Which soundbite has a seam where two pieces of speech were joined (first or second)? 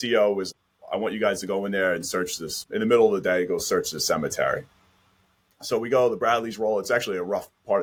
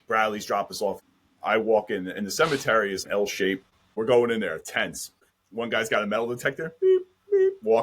second